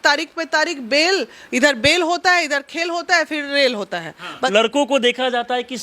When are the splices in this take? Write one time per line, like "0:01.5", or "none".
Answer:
0:04.5

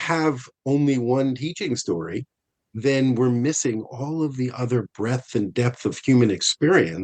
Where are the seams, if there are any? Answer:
none

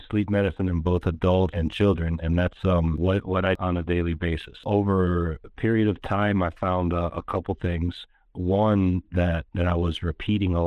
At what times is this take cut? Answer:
0:01.6
0:03.5
0:04.6

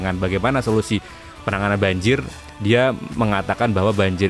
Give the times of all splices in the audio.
none

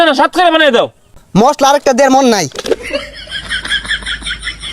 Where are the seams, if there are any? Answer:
0:01.1
0:03.0

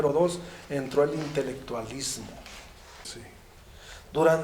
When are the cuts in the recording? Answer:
0:03.0

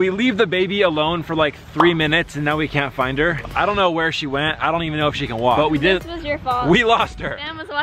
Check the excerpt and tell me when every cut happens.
none

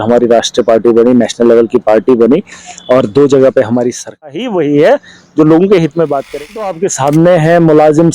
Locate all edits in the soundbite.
0:04.2
0:06.6

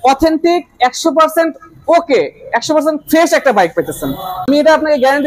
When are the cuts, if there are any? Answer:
0:04.3

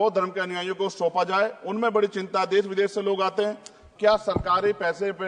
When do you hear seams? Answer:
0:03.8

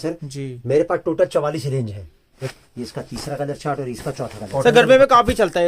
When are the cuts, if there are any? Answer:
0:02.4
0:04.5

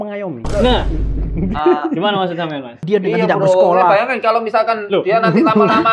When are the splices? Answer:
0:02.8

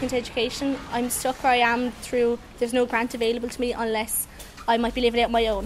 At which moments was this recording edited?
none

